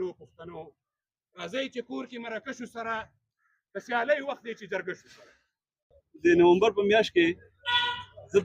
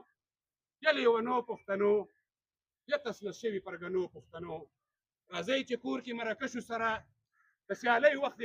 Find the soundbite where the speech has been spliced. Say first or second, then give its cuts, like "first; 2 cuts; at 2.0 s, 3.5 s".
first; 1 cut; at 6.0 s